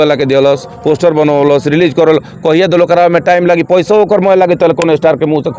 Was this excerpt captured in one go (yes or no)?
yes